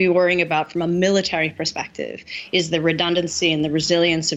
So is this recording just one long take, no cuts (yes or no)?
yes